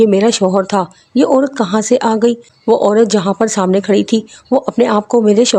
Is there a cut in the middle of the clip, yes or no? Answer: no